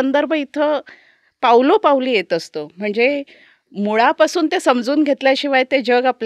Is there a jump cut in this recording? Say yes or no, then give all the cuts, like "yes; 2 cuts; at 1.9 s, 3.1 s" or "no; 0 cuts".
no; 0 cuts